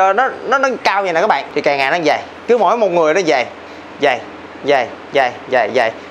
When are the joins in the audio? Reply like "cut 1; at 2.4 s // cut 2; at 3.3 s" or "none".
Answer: cut 1; at 1.5 s